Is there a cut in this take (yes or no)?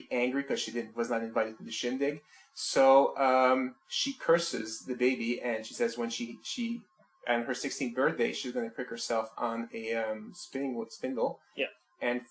no